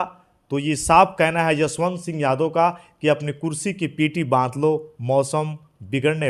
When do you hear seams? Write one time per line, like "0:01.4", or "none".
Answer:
none